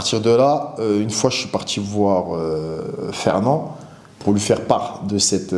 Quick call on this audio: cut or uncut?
uncut